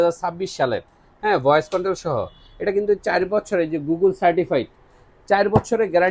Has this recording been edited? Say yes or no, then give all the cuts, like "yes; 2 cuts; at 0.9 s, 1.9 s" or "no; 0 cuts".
no; 0 cuts